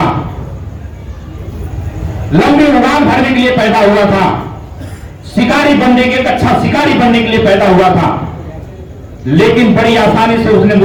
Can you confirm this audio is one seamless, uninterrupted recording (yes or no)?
yes